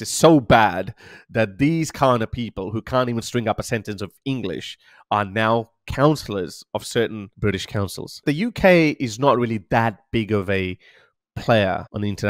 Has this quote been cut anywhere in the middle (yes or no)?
yes